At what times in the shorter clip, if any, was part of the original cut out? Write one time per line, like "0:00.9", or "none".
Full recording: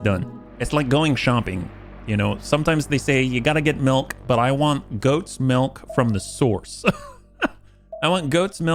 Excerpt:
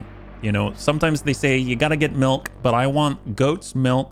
none